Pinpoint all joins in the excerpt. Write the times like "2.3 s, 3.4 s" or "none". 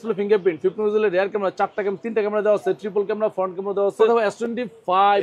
4.1 s